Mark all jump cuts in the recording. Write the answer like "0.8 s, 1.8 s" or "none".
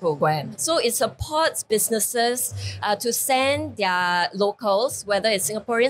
none

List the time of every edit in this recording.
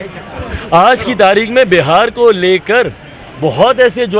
none

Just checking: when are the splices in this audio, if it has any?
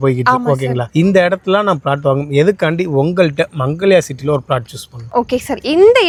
none

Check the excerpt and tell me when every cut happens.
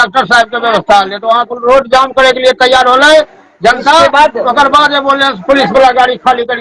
none

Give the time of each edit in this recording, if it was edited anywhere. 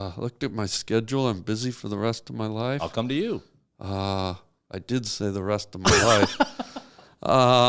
none

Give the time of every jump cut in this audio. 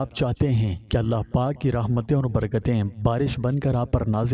none

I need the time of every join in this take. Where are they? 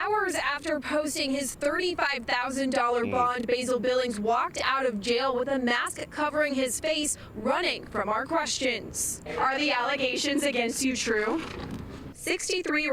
none

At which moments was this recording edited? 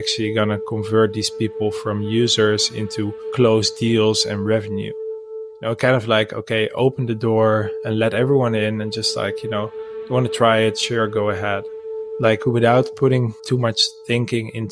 5.4 s, 11.8 s, 13.4 s

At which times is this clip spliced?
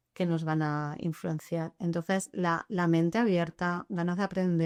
none

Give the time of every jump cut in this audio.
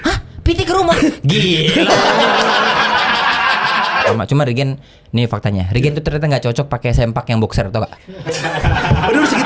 4.1 s

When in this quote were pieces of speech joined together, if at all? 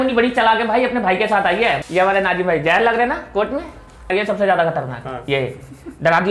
1.8 s, 4.1 s

